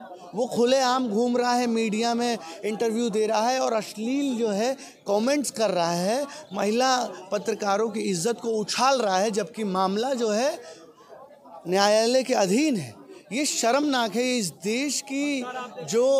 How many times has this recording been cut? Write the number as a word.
zero